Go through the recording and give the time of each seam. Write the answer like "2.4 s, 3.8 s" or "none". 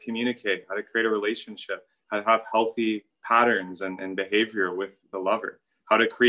3.1 s, 5.1 s